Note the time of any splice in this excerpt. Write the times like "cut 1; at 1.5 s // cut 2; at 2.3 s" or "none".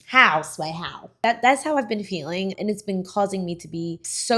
cut 1; at 1.1 s // cut 2; at 2.6 s